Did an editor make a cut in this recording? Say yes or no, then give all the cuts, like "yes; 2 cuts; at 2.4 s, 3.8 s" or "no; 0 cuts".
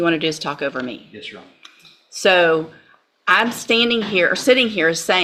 no; 0 cuts